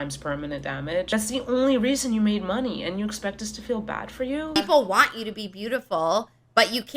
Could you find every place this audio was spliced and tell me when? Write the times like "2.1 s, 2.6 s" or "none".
1.1 s, 4.6 s